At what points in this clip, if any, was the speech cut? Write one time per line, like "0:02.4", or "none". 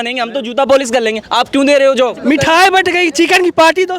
0:02.2